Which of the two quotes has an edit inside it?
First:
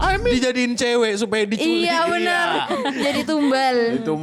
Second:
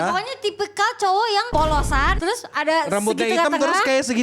second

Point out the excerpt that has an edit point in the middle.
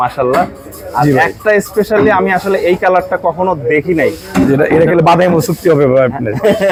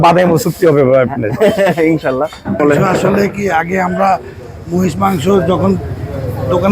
second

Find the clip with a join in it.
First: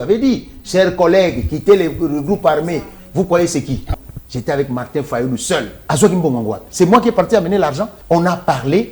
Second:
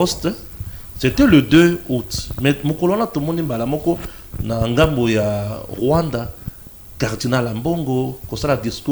first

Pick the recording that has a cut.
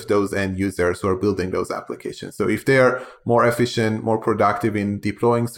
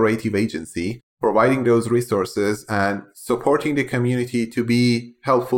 second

